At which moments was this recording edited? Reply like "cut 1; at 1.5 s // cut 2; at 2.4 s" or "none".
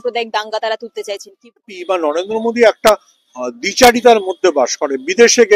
cut 1; at 1.7 s